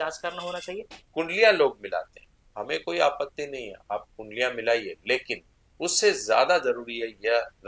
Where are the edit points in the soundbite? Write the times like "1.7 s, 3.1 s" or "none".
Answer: 0.9 s